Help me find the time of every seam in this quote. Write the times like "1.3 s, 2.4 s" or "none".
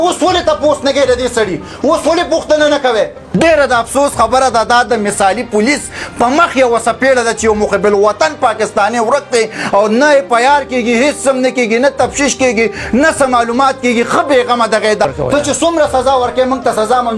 3.4 s, 15.0 s

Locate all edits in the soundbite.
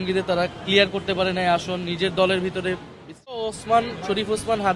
3.4 s

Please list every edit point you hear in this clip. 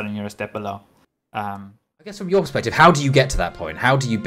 2.2 s

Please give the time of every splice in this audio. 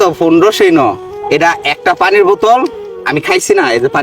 1.0 s

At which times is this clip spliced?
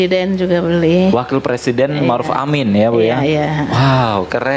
none

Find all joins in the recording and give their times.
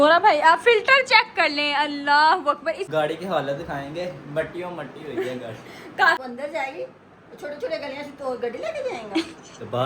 2.8 s, 6.2 s

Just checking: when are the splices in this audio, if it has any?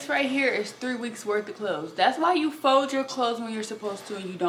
none

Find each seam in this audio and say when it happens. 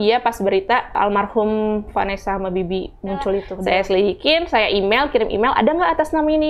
1.0 s, 3.5 s

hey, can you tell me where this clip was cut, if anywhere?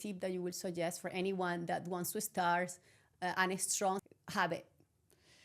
4.0 s

